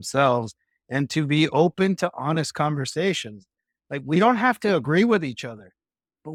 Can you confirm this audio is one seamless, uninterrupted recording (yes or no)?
yes